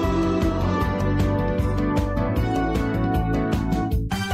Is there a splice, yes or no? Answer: no